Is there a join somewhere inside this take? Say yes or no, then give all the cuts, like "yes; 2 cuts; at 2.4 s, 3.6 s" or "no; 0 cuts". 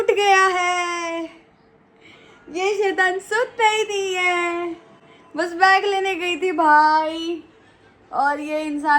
no; 0 cuts